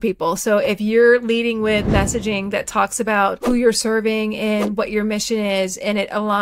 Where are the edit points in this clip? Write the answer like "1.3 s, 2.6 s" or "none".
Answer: 3.4 s

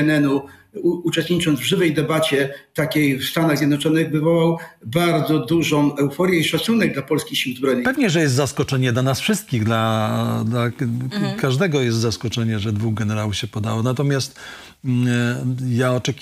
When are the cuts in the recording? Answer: 7.8 s

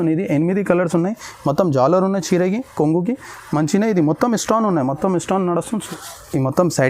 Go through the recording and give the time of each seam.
5.7 s

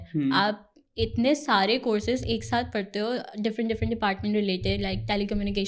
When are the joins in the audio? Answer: none

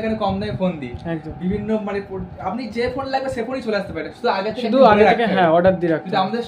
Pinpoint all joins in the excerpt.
none

